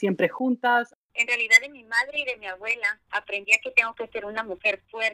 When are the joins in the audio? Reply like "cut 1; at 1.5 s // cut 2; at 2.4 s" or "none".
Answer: cut 1; at 0.9 s